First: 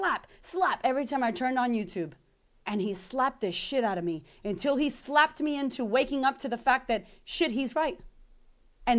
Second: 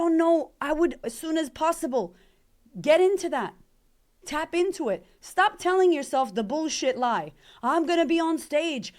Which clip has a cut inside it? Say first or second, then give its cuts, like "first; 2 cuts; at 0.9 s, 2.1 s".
second; 1 cut; at 1.1 s